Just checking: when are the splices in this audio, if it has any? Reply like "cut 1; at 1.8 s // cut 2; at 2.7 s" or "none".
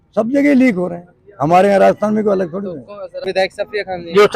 cut 1; at 3.2 s